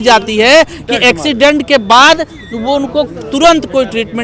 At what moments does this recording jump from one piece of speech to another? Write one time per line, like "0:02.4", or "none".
none